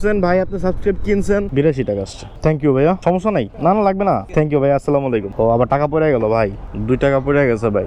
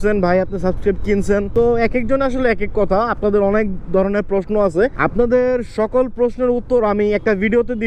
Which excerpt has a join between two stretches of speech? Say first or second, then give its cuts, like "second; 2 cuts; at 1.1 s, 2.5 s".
first; 3 cuts; at 1.5 s, 4.3 s, 5.3 s